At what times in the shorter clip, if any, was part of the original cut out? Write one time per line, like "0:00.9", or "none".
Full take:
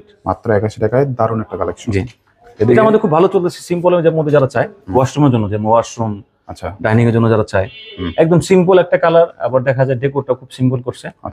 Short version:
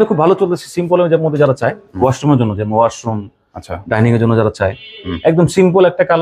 none

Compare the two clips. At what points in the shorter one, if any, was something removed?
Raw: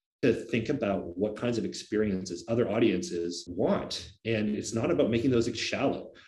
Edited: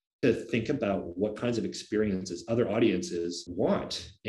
none

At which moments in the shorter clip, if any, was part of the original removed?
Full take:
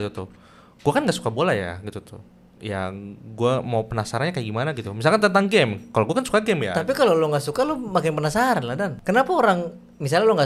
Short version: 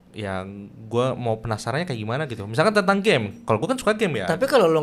none

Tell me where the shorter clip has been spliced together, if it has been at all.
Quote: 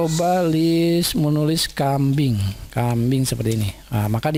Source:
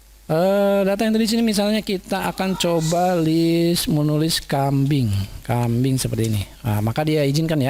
none

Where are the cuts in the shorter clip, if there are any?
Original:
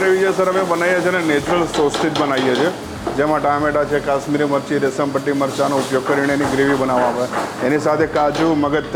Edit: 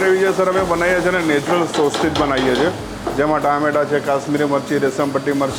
none

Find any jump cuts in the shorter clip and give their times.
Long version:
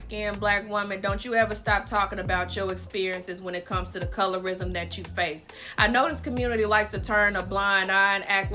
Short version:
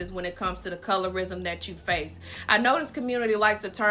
none

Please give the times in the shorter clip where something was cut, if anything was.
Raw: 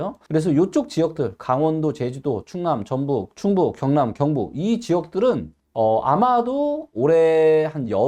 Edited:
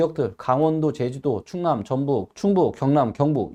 none

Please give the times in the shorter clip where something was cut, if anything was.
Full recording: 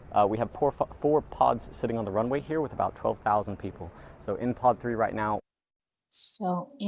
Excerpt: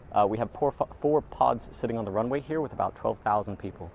none

